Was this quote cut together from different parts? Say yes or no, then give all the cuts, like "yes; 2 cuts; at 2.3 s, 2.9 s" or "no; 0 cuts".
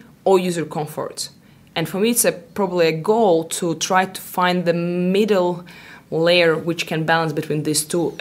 no; 0 cuts